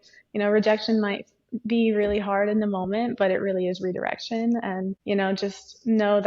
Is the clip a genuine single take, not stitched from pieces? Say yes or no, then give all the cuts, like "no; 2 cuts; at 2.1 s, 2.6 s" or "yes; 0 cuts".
no; 1 cut; at 5.0 s